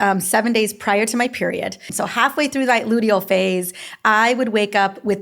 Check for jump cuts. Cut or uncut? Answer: cut